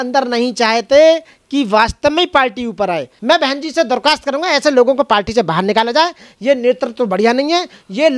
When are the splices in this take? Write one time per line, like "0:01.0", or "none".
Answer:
0:03.1